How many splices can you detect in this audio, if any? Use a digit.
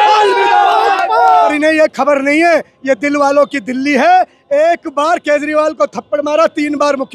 1